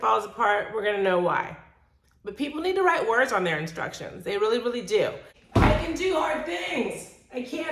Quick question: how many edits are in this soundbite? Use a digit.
1